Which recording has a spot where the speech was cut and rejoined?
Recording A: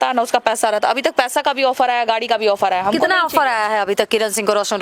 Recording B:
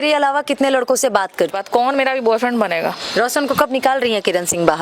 B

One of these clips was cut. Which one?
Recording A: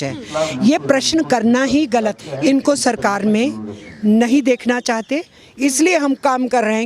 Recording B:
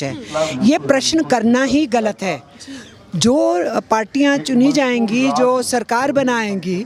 A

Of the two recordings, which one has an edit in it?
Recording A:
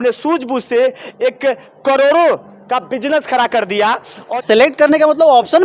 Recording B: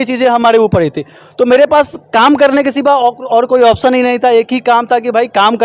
A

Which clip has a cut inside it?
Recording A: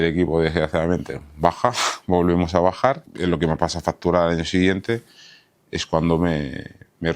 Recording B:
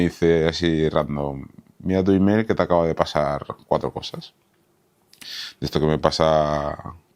A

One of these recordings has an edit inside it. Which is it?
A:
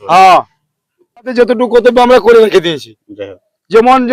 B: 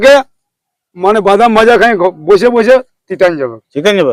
A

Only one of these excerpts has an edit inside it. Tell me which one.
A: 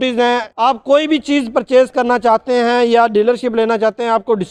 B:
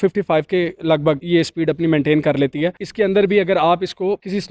B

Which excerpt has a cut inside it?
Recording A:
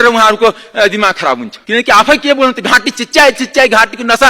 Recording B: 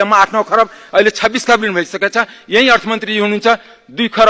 A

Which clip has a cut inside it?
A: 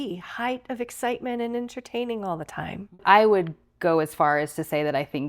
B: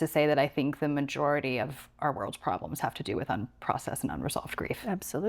A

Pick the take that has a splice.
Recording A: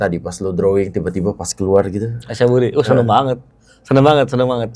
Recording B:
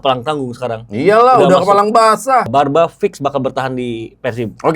B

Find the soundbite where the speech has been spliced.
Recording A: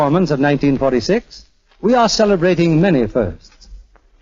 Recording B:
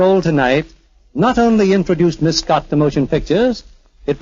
A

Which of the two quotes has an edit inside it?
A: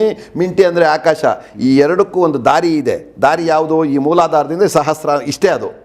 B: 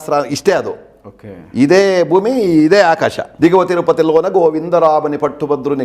B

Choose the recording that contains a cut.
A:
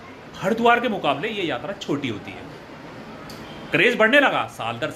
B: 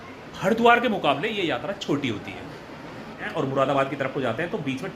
B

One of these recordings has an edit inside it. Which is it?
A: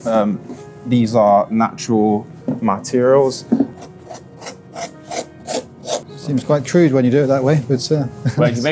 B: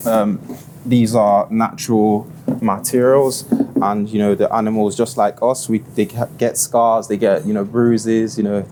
A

